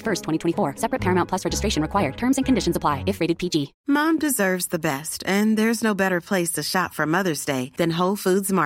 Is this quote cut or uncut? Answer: cut